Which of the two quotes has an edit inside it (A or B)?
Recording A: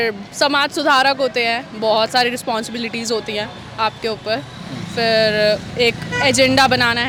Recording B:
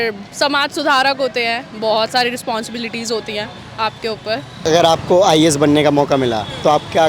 B